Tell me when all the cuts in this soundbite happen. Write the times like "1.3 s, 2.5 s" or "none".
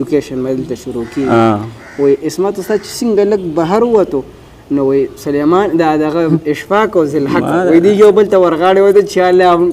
none